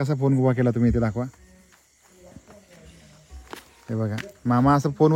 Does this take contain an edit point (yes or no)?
no